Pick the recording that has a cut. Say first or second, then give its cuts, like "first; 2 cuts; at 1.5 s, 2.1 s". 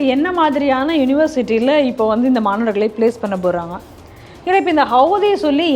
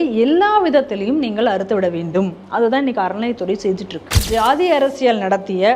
second; 1 cut; at 4.2 s